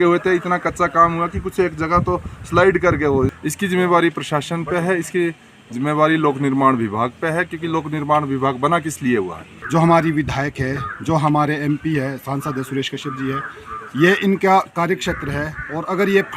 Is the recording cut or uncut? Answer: cut